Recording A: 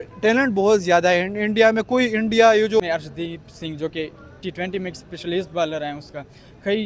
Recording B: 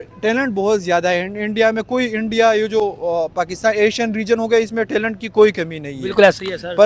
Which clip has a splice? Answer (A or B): A